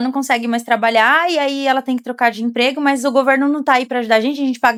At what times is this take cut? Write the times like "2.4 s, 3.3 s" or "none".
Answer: none